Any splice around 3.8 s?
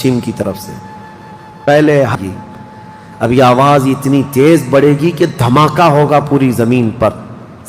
no; 1 cut; at 2.1 s

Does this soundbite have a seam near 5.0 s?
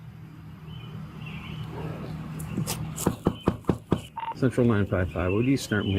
yes; 1 cut; at 5.0 s

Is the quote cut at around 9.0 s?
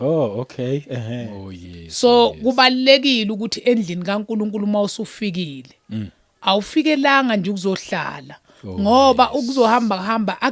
no; 1 cut; at 1.3 s

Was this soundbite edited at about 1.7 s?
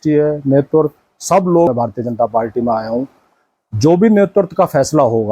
yes; 1 cut; at 1.7 s

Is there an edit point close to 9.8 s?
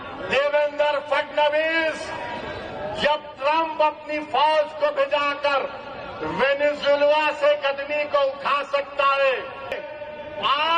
yes; 1 cut; at 9.8 s

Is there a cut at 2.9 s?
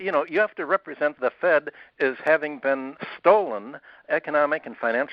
yes; 3 cuts; at 1.2 s, 2.9 s, 4.0 s

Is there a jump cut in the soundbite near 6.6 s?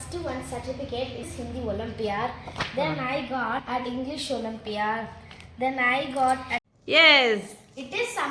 yes; 1 cut; at 6.6 s

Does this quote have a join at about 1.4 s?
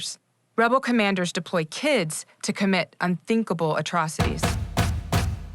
yes; 1 cut; at 1.4 s

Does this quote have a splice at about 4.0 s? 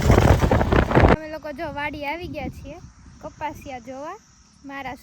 no; 1 cut; at 1.2 s

